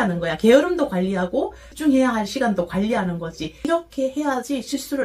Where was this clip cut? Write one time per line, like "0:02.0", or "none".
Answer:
0:03.6